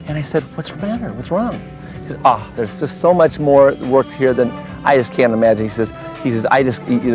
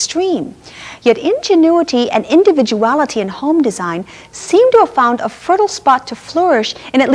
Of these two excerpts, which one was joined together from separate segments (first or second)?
second